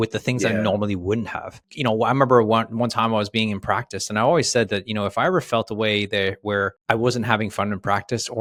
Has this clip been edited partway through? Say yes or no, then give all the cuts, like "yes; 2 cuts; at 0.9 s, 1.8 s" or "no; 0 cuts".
no; 0 cuts